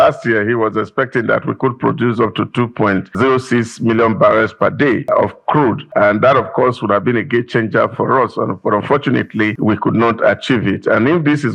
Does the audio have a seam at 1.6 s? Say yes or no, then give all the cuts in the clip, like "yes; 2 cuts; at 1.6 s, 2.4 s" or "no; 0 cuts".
no; 3 cuts; at 3.2 s, 5.4 s, 9.6 s